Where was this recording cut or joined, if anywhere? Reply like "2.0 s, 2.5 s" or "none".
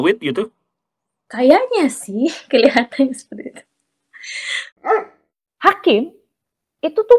4.9 s